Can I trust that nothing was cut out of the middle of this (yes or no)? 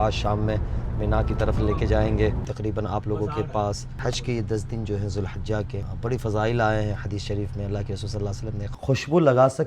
no